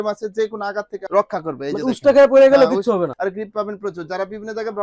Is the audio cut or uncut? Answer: cut